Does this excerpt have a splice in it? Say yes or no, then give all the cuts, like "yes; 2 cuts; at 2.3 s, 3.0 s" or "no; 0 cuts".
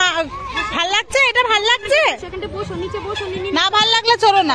no; 0 cuts